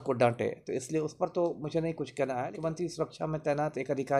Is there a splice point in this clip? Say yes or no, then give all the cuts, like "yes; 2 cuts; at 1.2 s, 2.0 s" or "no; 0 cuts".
yes; 1 cut; at 2.5 s